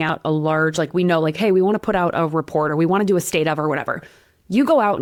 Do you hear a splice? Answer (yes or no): no